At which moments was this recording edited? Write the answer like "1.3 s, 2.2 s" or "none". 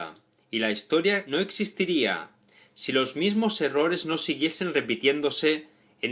none